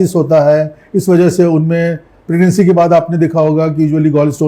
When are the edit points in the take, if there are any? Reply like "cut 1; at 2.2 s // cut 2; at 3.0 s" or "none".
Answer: none